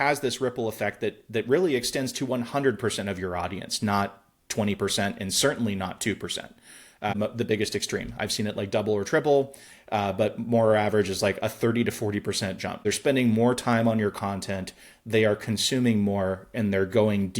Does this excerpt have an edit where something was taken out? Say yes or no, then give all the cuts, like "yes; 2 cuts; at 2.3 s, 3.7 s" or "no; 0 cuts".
yes; 2 cuts; at 7.2 s, 12.8 s